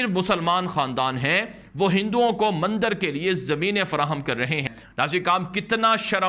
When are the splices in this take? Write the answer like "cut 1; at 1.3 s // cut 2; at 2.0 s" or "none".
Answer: none